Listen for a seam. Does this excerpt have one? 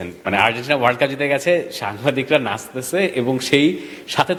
no; 0 cuts

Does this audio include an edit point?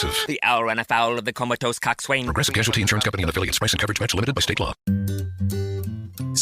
yes; 1 cut; at 4.9 s

